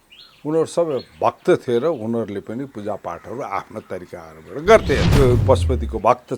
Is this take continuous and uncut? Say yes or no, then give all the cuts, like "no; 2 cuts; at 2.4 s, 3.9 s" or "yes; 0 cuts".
no; 1 cut; at 5.1 s